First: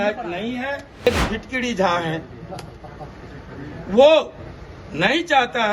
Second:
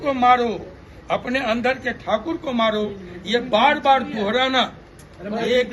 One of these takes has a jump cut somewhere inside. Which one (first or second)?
first